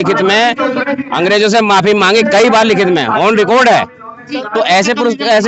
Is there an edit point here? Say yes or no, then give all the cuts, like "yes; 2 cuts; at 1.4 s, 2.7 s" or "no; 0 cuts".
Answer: no; 0 cuts